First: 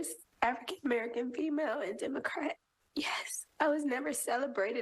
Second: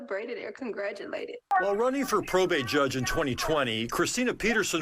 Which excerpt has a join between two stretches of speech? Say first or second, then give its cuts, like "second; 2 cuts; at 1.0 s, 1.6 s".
second; 1 cut; at 1.5 s